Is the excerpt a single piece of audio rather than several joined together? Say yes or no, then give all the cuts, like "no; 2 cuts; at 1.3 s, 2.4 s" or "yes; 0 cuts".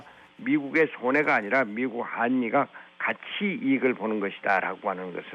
yes; 0 cuts